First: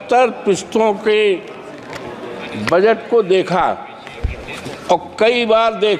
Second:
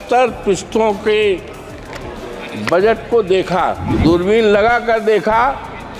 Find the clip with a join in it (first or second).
second